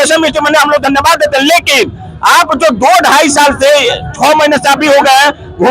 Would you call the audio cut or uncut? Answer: uncut